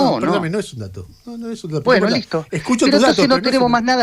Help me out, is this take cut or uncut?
uncut